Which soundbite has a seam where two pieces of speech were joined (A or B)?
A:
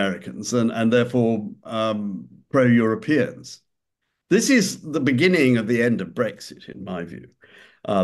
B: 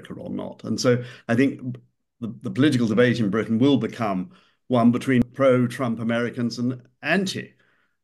B